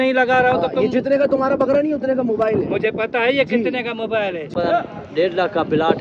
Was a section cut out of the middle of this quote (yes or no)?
yes